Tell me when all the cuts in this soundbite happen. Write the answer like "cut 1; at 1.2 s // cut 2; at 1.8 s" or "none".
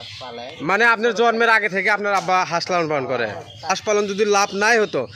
cut 1; at 3.7 s